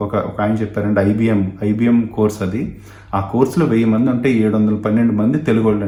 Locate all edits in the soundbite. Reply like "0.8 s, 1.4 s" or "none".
none